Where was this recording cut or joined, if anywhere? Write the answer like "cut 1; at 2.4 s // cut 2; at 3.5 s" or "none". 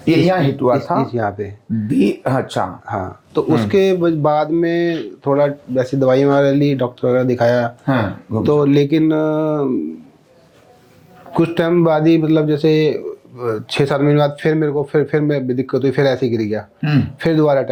none